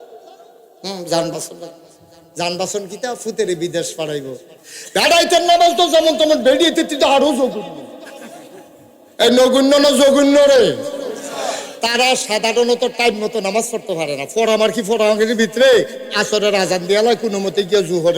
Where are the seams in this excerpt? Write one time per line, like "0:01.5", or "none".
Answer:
0:04.6